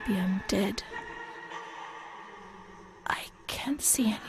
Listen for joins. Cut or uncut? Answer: cut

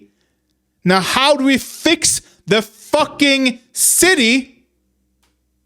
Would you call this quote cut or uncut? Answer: uncut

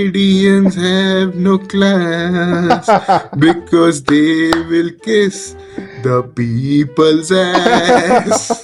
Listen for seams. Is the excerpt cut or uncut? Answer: uncut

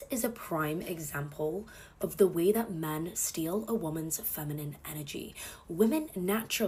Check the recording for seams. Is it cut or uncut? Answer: uncut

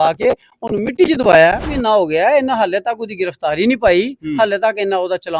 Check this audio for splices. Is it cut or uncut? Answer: cut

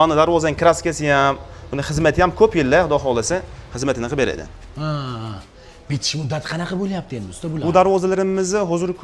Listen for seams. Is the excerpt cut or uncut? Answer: uncut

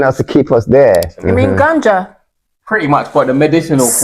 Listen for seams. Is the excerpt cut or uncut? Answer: cut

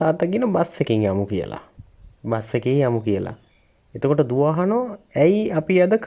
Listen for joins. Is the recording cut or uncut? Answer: uncut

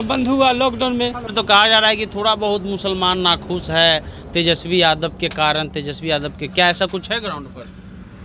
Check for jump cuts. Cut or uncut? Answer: cut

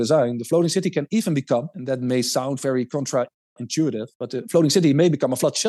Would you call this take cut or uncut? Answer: uncut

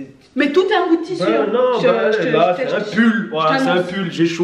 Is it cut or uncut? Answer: uncut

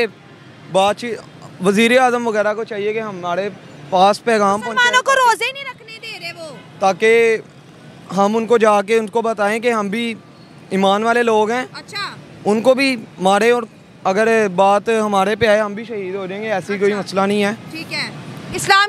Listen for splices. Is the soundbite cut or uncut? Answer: uncut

